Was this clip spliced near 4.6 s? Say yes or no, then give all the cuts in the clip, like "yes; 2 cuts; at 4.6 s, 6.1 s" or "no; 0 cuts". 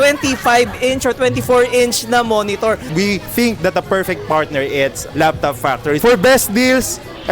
no; 2 cuts; at 2.9 s, 6.0 s